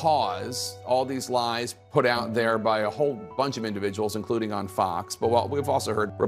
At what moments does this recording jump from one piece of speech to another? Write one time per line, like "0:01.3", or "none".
none